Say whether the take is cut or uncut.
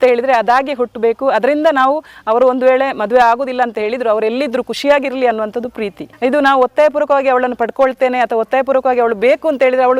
uncut